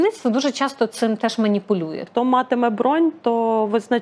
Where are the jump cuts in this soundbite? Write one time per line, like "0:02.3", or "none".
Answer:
0:02.1